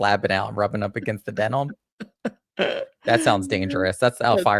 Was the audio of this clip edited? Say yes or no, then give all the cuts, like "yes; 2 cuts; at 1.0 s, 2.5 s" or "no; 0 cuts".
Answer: no; 0 cuts